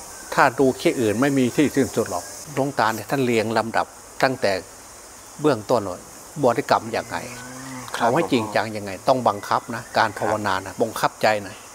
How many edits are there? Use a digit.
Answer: 1